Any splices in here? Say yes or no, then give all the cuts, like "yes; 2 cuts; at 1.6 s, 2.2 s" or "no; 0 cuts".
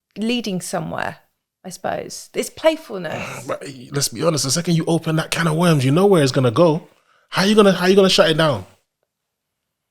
no; 0 cuts